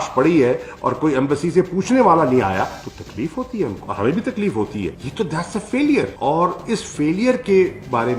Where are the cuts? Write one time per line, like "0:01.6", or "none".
0:03.8
0:05.0